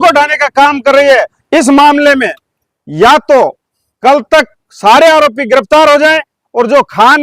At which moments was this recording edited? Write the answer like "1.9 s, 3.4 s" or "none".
1.4 s